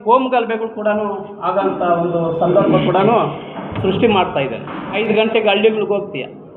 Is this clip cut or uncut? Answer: cut